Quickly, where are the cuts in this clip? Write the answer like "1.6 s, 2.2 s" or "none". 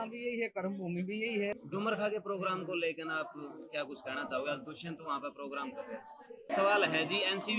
1.6 s, 6.5 s